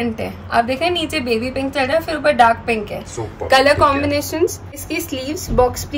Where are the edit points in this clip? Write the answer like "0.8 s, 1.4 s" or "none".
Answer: 4.8 s